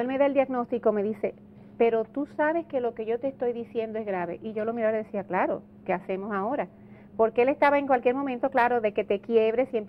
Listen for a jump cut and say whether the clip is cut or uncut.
uncut